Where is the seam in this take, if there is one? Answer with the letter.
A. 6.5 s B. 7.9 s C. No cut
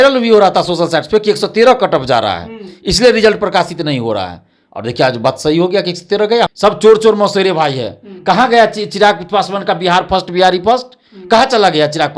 A